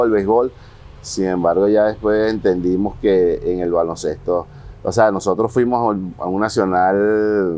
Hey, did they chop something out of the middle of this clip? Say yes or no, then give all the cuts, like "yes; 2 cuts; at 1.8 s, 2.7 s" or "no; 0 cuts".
no; 0 cuts